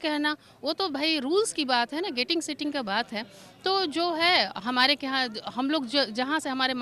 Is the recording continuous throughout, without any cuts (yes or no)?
yes